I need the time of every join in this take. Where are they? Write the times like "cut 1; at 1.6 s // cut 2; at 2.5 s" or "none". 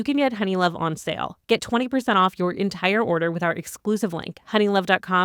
none